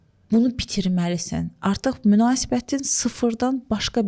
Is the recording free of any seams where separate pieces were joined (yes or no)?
yes